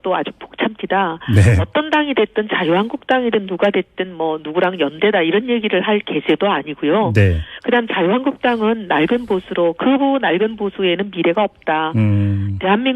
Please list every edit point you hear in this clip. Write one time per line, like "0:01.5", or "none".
0:04.9